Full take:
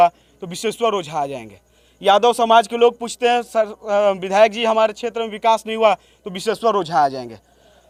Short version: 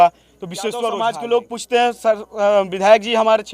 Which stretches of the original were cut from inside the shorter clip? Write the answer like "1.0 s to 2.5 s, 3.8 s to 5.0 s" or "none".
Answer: 0.9 s to 2.4 s